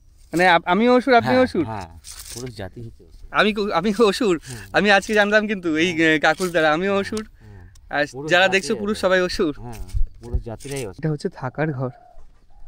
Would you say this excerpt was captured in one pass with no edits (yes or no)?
no